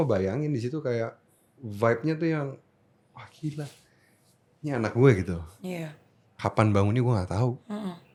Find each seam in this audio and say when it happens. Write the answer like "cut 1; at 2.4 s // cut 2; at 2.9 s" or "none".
none